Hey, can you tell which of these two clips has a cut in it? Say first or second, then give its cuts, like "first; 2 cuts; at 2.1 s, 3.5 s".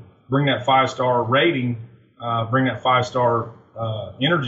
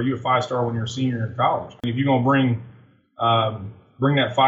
second; 1 cut; at 1.8 s